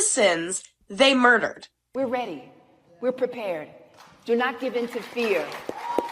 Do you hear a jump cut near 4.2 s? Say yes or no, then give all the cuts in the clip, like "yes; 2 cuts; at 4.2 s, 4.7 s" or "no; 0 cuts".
no; 1 cut; at 1.9 s